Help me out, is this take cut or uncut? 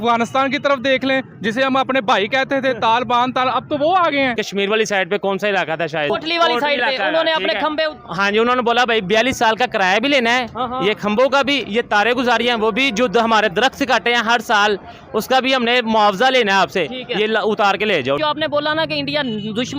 cut